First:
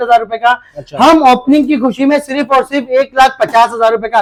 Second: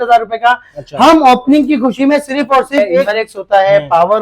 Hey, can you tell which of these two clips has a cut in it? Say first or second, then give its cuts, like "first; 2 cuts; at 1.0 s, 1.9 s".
second; 1 cut; at 3.0 s